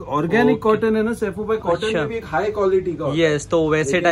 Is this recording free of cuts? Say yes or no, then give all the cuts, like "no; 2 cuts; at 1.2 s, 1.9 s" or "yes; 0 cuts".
yes; 0 cuts